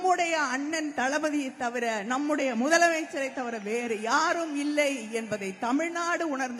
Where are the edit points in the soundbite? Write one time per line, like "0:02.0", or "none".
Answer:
none